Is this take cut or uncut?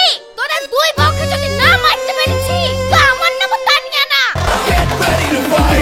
uncut